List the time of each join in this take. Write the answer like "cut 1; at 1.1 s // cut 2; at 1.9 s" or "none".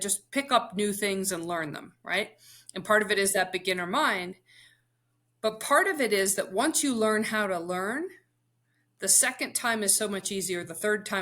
none